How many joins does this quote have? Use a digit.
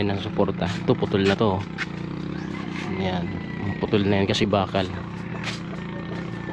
0